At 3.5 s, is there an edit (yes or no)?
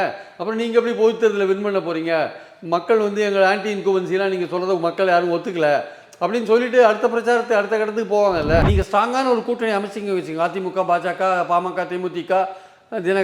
no